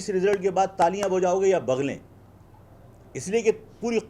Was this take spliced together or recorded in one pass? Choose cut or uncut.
uncut